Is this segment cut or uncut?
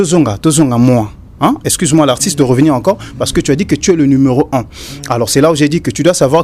uncut